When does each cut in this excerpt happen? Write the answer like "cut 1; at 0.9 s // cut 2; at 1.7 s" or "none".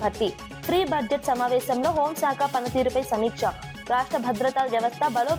none